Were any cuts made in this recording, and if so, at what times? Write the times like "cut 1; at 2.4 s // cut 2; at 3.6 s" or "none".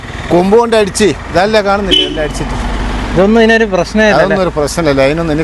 none